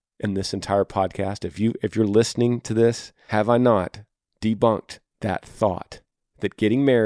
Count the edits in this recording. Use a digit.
1